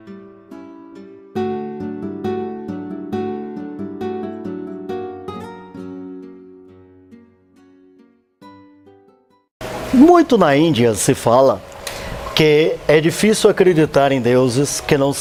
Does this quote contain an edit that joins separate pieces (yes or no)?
no